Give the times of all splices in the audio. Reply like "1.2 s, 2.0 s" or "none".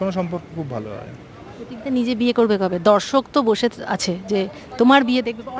none